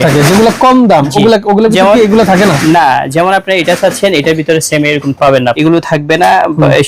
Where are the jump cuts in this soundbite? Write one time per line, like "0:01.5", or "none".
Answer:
0:05.6